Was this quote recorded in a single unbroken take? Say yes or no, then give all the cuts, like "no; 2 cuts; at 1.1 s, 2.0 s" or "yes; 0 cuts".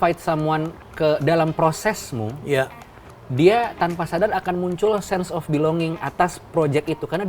yes; 0 cuts